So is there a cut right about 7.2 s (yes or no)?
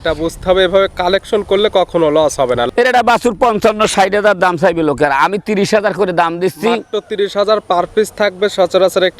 no